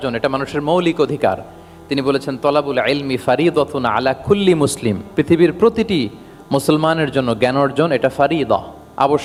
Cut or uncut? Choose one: uncut